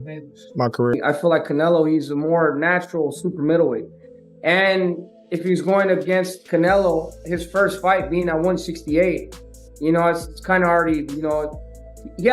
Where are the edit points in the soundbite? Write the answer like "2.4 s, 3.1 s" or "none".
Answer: 0.9 s